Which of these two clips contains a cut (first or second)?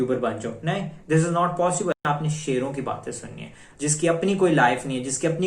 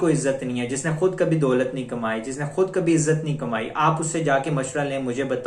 first